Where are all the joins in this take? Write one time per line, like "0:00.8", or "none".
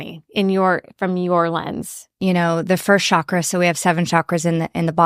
0:02.0

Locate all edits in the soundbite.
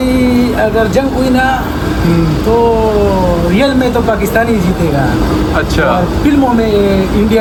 none

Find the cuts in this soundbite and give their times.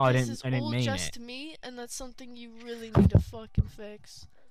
none

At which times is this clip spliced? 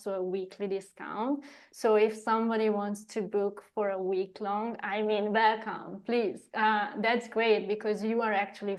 none

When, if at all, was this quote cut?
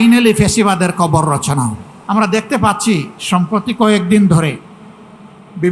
0:01.9

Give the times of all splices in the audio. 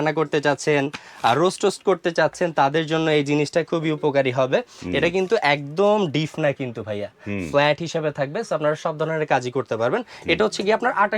none

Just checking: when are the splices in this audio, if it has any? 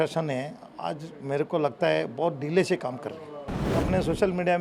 0:03.7

